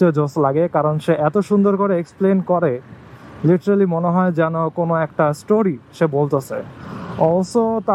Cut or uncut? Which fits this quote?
uncut